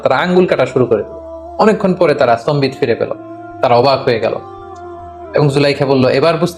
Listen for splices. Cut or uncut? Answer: uncut